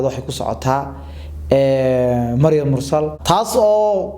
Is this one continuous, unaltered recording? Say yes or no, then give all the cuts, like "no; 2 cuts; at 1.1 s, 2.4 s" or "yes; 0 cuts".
yes; 0 cuts